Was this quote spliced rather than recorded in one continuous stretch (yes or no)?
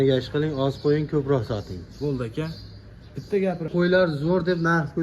yes